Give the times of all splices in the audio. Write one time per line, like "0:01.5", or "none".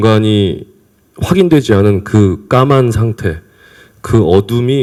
none